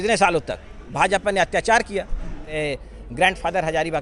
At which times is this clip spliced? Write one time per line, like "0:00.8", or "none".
0:00.8
0:02.5